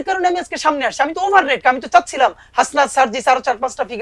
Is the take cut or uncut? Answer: cut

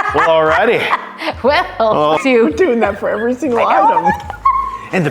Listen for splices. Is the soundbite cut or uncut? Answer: cut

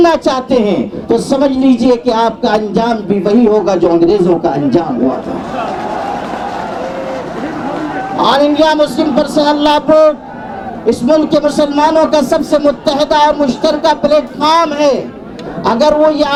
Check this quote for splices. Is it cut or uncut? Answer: uncut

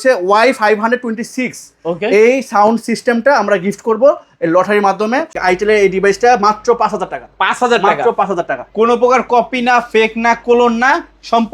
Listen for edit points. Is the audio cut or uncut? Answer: cut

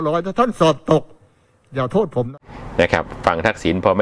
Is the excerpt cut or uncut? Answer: cut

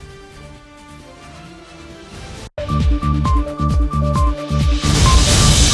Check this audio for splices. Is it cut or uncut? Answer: uncut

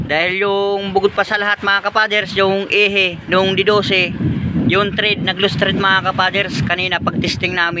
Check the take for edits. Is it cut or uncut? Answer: uncut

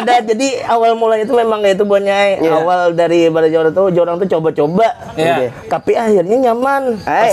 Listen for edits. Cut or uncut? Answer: uncut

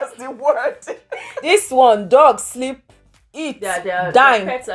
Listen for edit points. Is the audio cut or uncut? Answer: cut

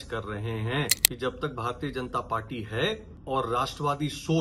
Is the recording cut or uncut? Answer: cut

